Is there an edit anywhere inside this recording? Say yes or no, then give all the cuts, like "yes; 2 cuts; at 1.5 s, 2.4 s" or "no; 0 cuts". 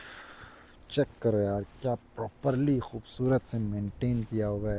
no; 0 cuts